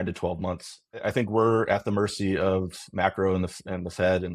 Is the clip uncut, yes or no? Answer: no